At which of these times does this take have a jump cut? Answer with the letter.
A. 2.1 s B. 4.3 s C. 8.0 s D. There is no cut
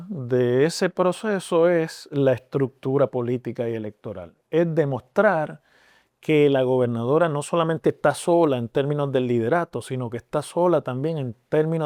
D